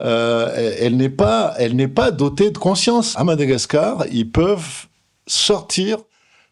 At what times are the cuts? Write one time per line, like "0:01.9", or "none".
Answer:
0:03.1